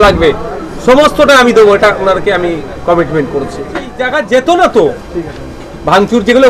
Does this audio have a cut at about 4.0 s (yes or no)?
yes